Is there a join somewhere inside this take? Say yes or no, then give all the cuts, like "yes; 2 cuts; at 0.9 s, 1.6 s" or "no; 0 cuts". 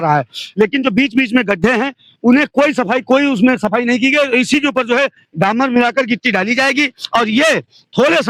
no; 0 cuts